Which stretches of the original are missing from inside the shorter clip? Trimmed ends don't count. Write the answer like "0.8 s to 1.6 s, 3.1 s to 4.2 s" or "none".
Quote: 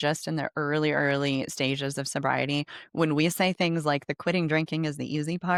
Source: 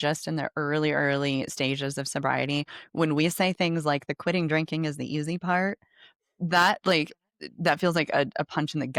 none

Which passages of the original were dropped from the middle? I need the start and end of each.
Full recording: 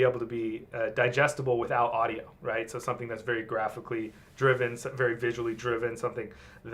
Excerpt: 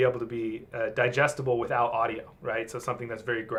none

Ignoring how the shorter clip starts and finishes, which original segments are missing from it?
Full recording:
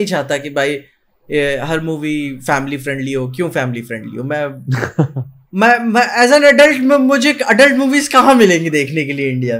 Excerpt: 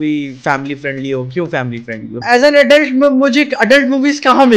4.2 s to 6.1 s

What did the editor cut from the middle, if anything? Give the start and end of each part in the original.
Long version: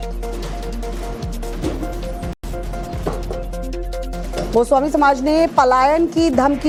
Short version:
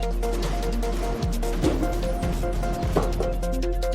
2.4 s to 2.5 s

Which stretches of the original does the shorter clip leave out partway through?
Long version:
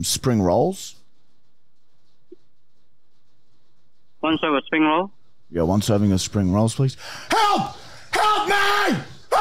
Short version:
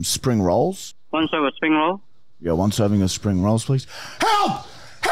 0.9 s to 4.0 s

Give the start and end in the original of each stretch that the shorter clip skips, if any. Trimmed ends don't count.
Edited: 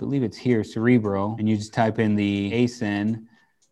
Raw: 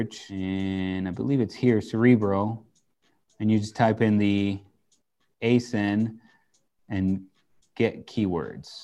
2.5 s to 3.4 s, 4.5 s to 5.4 s

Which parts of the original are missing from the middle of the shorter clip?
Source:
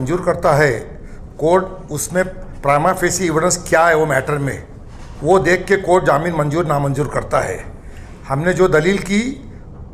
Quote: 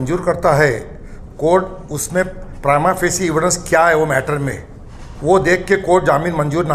none

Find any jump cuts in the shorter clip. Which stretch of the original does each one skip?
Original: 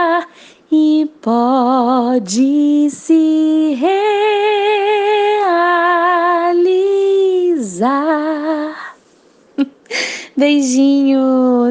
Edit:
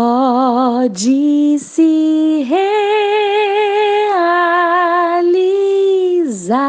none

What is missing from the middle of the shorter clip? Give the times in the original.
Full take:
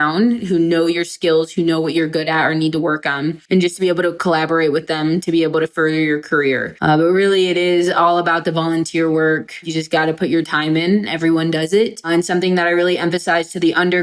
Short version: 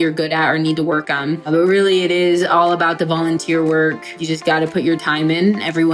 3.5 s to 7.0 s

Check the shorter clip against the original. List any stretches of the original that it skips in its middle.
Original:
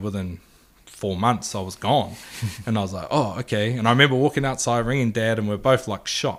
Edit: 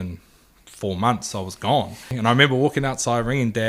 2.3 s to 3.7 s

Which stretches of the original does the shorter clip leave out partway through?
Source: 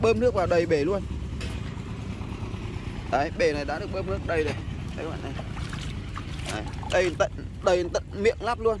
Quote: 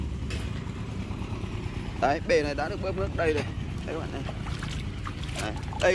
none

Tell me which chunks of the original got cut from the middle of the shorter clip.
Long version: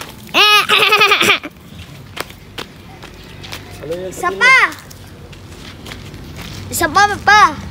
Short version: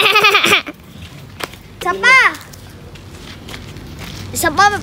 2.5 s to 4.2 s

